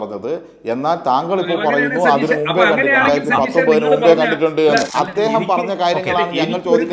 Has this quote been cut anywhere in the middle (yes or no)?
yes